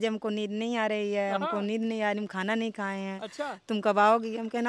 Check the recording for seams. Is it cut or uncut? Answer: uncut